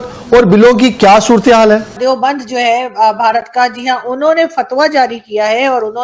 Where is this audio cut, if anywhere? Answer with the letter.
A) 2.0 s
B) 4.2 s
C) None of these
A